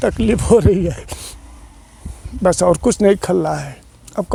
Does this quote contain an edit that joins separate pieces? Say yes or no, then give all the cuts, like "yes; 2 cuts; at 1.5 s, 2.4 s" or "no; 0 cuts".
no; 0 cuts